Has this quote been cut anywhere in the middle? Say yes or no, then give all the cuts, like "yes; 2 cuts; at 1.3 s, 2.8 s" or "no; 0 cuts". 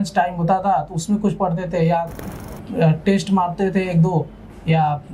yes; 1 cut; at 2.2 s